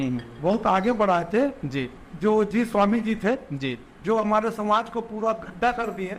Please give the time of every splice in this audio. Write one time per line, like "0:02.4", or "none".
none